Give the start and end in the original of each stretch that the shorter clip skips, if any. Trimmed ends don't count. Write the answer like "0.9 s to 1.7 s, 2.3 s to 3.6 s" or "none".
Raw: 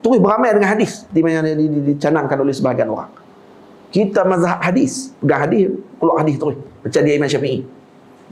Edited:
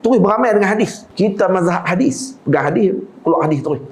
1.0 s to 3.8 s